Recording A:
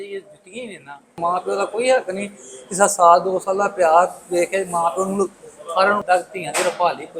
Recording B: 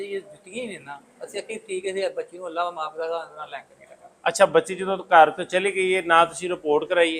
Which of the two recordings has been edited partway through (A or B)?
A